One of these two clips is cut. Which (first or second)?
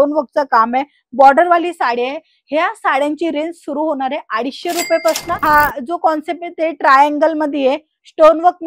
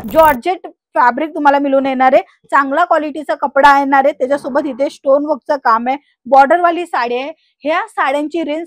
first